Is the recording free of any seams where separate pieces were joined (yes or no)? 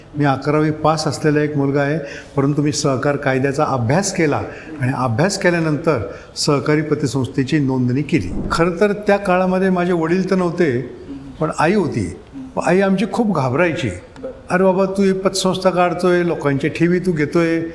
no